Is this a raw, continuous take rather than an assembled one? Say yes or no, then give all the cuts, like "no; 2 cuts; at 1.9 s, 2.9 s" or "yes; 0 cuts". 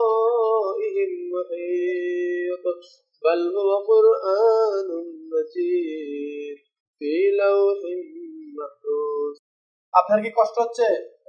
yes; 0 cuts